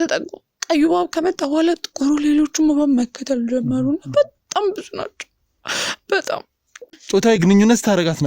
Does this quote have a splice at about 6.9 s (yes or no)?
yes